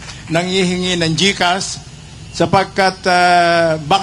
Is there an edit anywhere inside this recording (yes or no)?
no